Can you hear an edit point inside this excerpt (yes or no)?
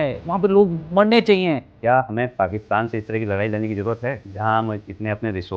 yes